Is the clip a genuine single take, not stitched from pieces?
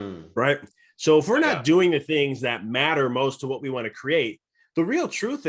yes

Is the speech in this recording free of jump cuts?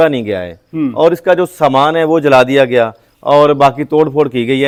yes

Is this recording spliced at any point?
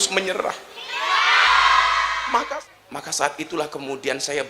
yes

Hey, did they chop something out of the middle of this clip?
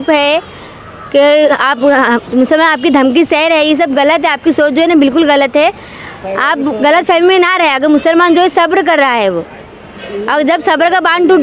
no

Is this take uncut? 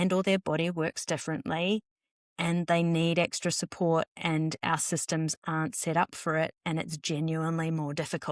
yes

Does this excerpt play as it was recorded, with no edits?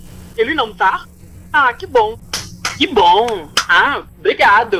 yes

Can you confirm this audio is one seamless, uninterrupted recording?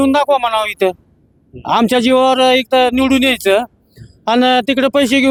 yes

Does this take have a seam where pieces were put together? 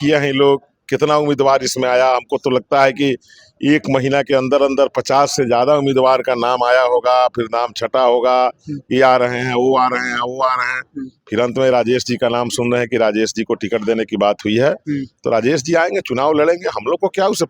no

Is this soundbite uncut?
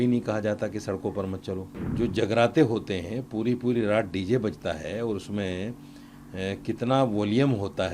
no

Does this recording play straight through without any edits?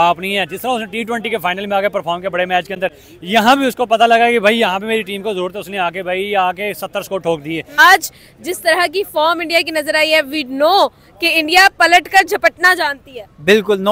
yes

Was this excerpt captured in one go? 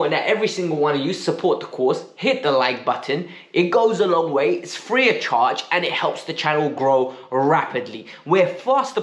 yes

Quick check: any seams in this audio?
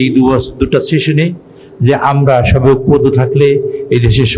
no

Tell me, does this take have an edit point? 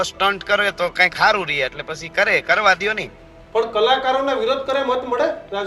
no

